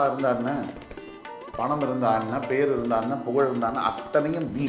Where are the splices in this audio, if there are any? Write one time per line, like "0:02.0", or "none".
none